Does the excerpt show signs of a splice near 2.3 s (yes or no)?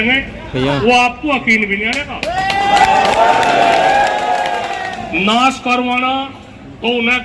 no